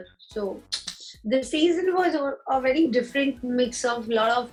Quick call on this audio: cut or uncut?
uncut